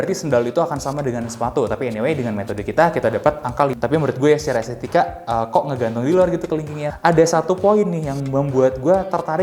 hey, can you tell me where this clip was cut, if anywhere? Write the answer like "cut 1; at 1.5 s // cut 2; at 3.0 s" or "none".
cut 1; at 3.7 s // cut 2; at 6.8 s